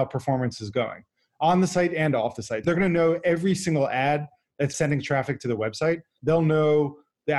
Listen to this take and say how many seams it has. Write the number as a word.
three